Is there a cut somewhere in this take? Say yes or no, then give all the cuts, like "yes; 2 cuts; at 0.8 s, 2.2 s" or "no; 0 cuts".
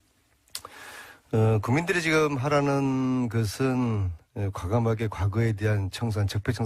yes; 1 cut; at 5.2 s